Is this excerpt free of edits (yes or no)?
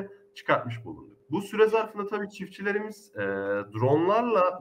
yes